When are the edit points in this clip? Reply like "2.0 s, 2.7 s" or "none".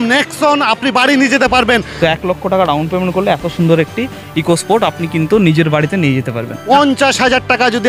1.9 s, 6.5 s